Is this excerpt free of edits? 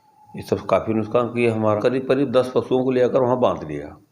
no; 1 cut; at 1.8 s

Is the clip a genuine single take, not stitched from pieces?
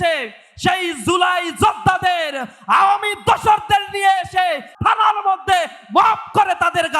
no; 1 cut; at 4.7 s

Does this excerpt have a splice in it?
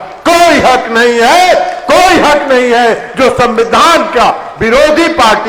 no; 0 cuts

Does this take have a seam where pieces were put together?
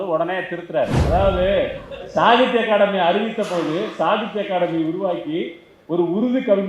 yes; 1 cut; at 1.0 s

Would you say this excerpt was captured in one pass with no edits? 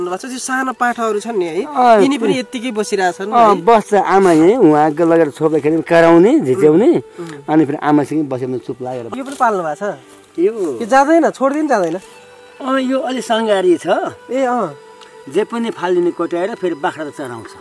no; 1 cut; at 9.1 s

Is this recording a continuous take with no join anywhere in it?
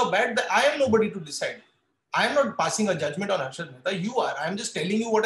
yes; 0 cuts

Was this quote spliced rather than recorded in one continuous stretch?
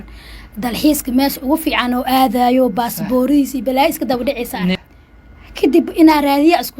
yes; 1 cut; at 4.8 s

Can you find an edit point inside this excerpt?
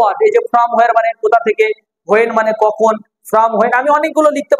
no; 0 cuts

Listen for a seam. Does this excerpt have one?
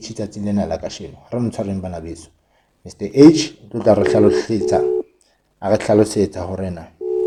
no; 0 cuts

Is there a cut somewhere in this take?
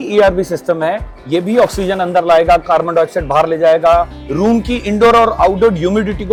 no; 0 cuts

